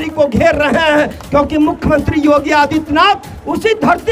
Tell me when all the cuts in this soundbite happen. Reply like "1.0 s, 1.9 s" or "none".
none